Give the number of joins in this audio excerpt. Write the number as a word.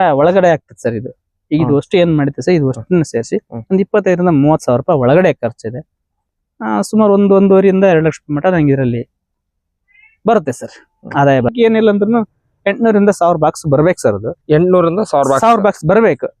one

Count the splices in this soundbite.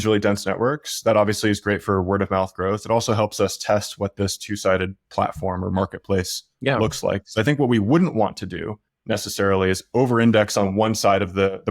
zero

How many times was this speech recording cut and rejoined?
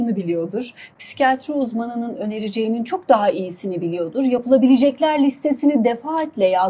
zero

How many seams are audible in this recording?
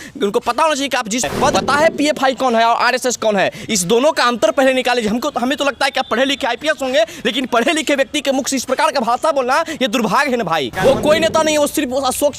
two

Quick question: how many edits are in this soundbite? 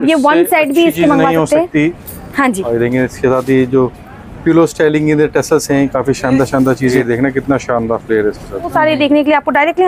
two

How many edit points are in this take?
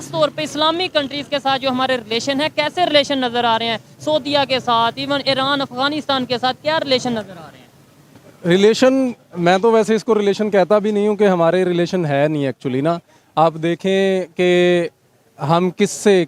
zero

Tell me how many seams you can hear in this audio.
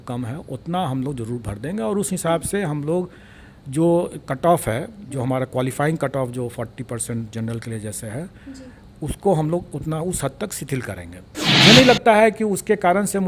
one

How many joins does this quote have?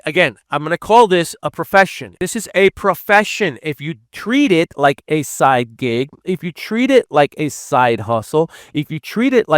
one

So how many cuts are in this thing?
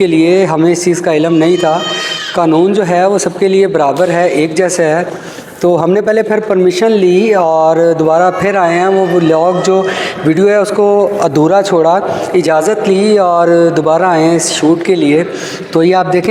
zero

